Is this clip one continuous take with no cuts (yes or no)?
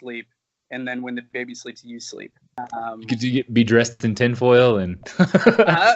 no